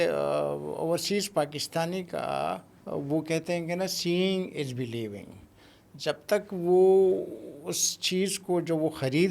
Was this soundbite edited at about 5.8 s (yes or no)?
no